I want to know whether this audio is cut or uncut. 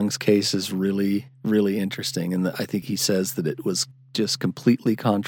cut